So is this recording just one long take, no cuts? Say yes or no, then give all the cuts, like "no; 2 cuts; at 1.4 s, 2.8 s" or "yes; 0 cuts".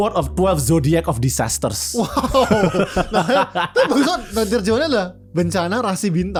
yes; 0 cuts